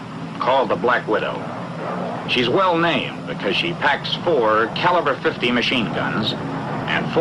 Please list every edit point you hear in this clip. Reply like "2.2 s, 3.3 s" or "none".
none